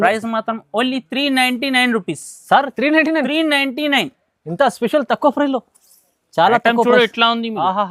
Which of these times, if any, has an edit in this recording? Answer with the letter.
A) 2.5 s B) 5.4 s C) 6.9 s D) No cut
D